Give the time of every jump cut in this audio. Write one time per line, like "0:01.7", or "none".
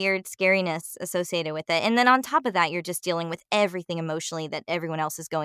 none